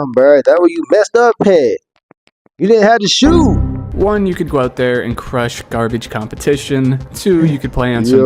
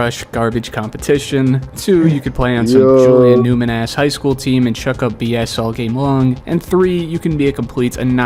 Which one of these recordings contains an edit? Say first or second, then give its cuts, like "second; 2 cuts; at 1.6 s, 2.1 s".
first; 1 cut; at 3.8 s